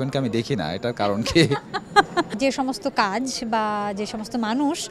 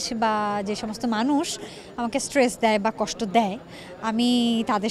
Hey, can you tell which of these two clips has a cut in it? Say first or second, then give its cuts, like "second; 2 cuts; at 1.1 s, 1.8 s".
first; 1 cut; at 2.3 s